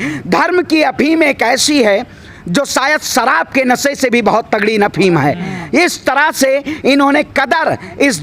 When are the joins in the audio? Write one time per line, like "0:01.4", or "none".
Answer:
none